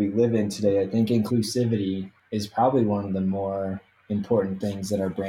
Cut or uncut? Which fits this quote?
cut